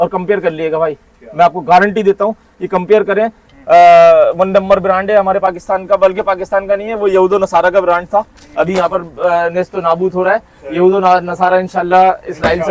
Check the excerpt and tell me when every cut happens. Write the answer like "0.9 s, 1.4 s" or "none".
none